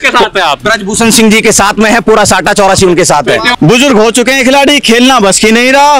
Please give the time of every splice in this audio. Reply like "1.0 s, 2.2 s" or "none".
3.5 s